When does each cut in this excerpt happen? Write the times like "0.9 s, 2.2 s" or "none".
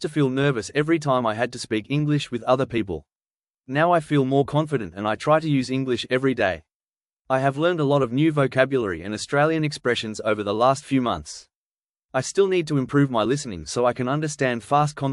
3.6 s, 7.2 s, 12.0 s